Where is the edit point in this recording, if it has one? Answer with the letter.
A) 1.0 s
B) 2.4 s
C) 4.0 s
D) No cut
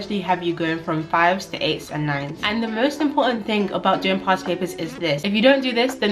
B